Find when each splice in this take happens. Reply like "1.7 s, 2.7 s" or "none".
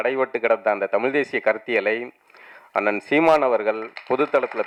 none

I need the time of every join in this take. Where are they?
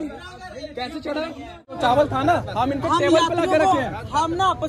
1.8 s

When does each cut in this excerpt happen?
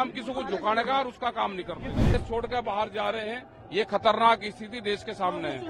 2.1 s

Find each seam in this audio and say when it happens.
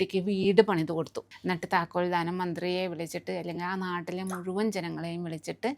1.2 s

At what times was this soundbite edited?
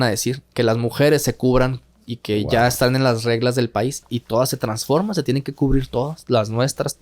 4.0 s

